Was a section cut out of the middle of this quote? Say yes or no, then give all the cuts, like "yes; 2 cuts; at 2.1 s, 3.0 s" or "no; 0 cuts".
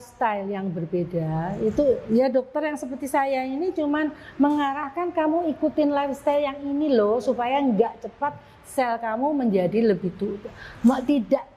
no; 0 cuts